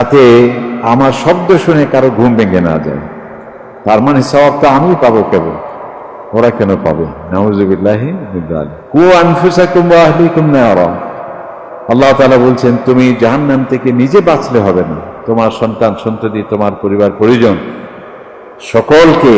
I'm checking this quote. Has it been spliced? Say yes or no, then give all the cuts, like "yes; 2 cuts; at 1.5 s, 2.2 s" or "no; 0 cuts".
no; 0 cuts